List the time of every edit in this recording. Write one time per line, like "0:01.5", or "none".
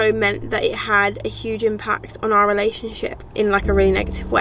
0:03.3